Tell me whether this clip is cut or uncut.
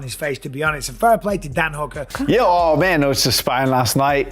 cut